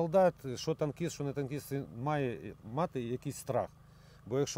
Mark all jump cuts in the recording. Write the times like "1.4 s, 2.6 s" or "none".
none

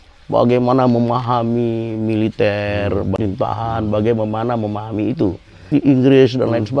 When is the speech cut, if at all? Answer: 3.2 s, 5.7 s

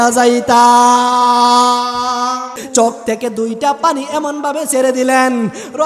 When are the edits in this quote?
2.6 s

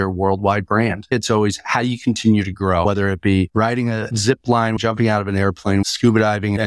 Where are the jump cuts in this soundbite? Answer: 1.1 s, 2.8 s, 4.8 s, 5.9 s

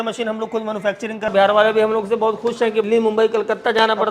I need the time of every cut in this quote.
1.3 s, 2.8 s

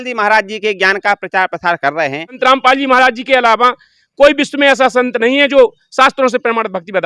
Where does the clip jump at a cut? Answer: 2.4 s

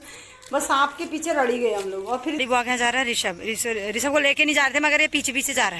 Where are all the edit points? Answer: 2.4 s

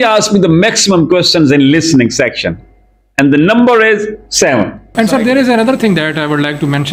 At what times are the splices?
4.8 s

